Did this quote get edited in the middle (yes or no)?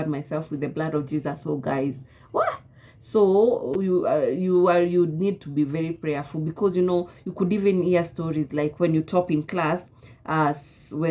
no